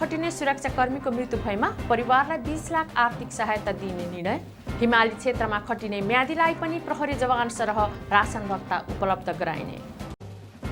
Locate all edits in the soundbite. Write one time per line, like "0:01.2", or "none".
none